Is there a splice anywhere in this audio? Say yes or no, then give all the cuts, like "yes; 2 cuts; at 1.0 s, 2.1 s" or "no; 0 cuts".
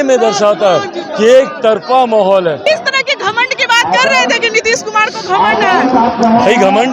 yes; 1 cut; at 2.7 s